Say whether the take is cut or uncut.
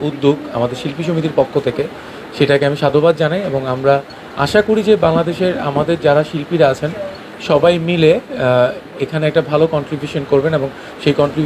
cut